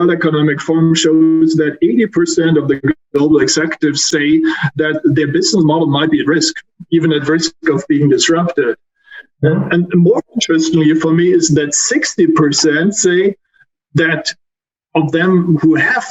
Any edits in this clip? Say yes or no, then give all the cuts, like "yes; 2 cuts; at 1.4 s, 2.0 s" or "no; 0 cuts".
yes; 1 cut; at 4.1 s